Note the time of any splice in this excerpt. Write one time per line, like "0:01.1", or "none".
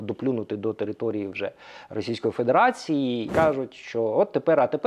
0:03.3

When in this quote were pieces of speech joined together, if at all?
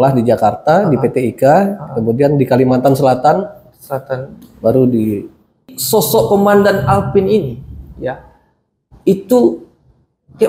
0:05.7

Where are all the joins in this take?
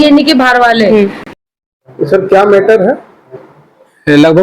0:01.2

